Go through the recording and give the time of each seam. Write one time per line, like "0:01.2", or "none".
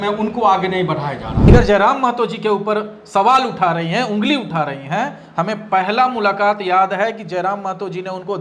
0:01.5